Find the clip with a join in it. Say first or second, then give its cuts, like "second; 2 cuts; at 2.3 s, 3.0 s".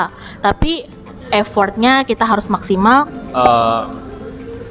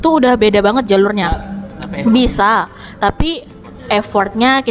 first; 1 cut; at 3.1 s